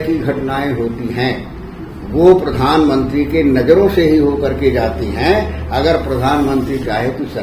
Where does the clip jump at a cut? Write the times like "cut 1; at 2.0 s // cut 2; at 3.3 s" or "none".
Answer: none

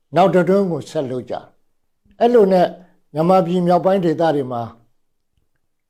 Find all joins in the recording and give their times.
none

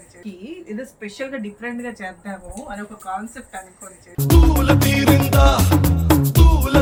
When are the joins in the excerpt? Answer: none

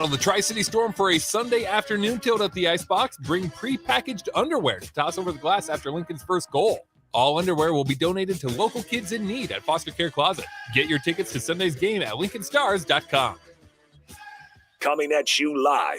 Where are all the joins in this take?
cut 1; at 14.8 s

